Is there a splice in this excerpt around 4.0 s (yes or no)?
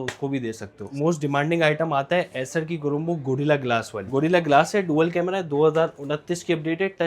yes